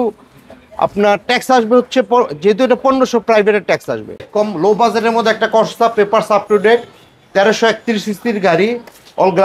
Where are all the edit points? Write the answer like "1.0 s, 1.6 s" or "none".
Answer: 4.3 s